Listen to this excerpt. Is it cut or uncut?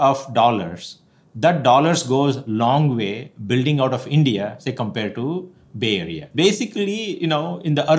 cut